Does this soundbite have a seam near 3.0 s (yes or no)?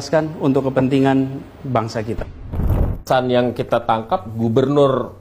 yes